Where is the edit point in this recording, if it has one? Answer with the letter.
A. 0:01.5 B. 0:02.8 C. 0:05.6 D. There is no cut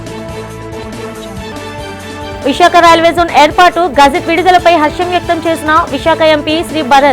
A